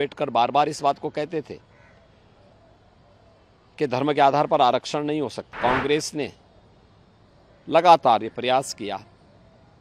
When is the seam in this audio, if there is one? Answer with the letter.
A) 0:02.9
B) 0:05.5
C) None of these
B